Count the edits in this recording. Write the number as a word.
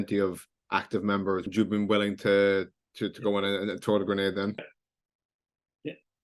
two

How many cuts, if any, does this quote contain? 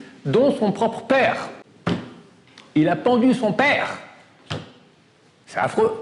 zero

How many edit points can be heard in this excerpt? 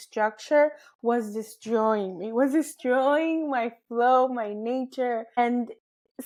zero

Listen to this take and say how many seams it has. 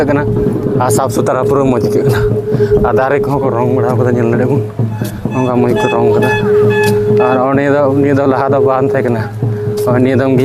zero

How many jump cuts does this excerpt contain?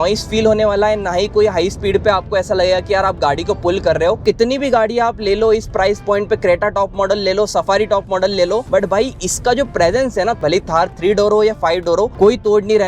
four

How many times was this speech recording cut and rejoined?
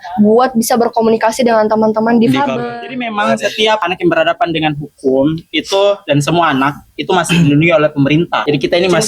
one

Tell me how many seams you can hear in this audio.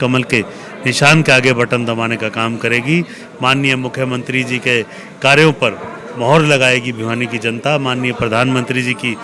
zero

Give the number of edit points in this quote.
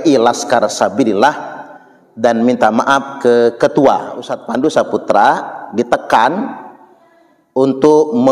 one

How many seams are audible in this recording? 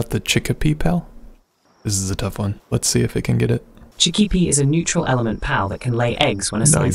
one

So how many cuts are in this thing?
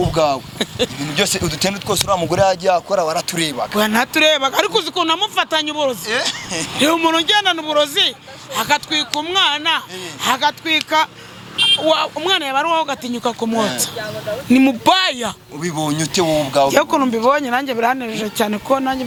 zero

